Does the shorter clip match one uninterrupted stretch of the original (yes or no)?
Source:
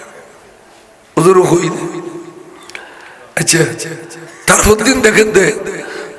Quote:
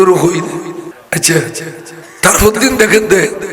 no